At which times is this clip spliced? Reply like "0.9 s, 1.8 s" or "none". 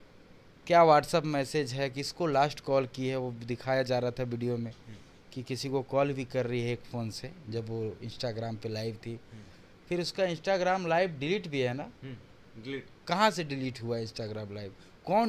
none